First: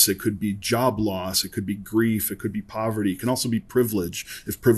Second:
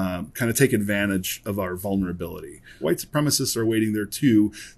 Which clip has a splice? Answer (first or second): second